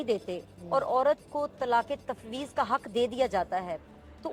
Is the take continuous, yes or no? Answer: yes